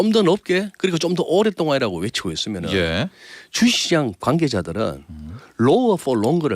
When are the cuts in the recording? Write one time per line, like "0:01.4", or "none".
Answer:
0:04.2

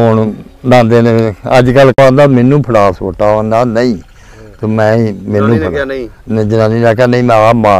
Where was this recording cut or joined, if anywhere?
0:02.0

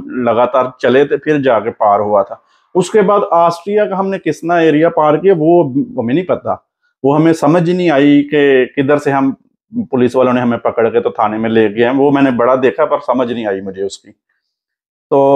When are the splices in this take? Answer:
none

